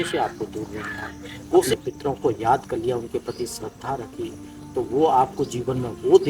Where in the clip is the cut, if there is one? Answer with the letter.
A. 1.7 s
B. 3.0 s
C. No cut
A